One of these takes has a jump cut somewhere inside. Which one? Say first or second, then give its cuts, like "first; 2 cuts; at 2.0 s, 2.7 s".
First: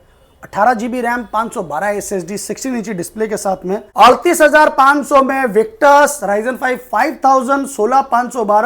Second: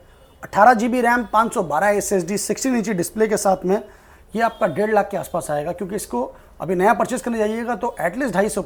first; 1 cut; at 3.9 s